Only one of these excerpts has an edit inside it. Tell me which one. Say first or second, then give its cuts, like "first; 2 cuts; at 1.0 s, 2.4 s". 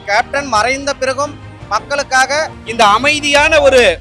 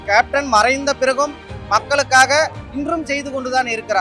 first; 1 cut; at 2.6 s